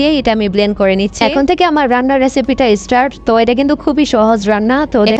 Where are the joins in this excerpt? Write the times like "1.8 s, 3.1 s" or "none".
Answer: none